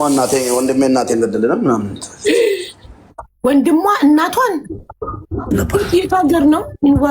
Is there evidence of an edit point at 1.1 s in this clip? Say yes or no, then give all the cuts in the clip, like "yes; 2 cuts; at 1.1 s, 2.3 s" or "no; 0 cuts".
no; 1 cut; at 5.5 s